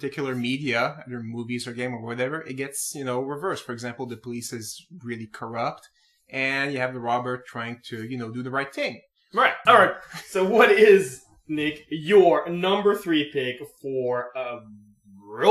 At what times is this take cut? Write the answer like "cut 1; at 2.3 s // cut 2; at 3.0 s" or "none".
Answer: cut 1; at 2.0 s